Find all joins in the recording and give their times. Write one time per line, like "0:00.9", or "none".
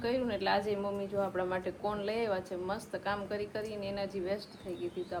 none